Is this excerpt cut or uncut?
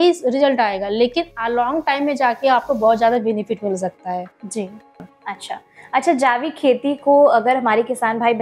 cut